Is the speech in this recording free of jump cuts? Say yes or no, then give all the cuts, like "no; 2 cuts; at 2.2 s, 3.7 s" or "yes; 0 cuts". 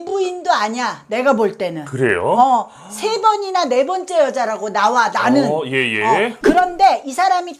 yes; 0 cuts